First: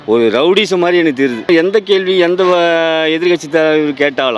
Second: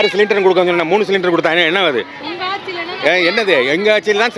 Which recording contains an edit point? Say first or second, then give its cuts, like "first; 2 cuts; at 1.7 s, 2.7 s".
first; 1 cut; at 1.5 s